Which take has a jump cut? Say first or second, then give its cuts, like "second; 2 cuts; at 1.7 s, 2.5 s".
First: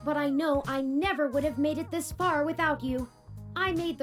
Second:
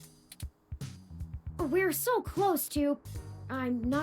second; 1 cut; at 1.2 s